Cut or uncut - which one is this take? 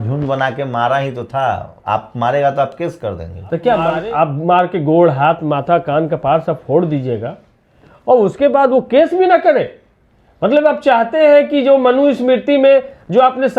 uncut